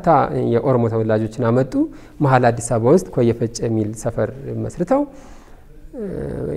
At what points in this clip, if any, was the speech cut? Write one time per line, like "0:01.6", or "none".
none